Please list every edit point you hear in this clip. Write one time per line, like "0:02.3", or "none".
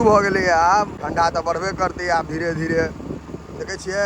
0:00.9